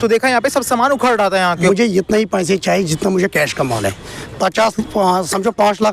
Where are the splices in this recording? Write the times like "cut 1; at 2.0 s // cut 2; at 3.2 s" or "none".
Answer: cut 1; at 1.6 s